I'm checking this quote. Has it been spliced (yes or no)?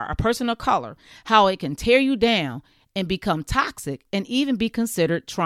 no